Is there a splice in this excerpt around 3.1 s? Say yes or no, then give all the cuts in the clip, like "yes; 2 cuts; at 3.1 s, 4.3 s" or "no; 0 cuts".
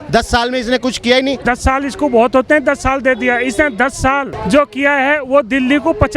no; 2 cuts; at 1.4 s, 4.3 s